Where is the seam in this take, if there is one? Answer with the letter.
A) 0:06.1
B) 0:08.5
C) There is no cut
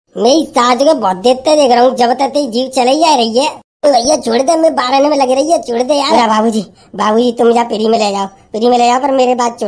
A